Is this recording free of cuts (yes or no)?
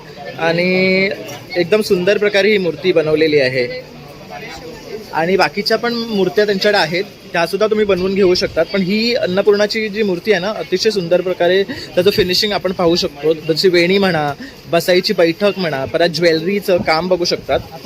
yes